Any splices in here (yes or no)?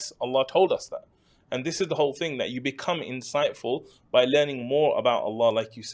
no